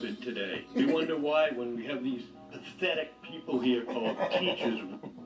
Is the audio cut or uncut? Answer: uncut